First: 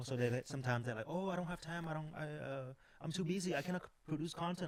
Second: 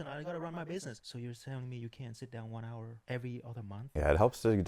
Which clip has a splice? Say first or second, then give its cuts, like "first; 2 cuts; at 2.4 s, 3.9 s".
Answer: second; 3 cuts; at 1.0 s, 3.0 s, 3.9 s